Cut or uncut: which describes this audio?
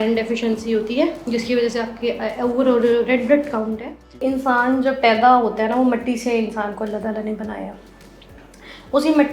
cut